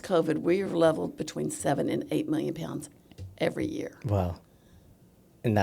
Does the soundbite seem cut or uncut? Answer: uncut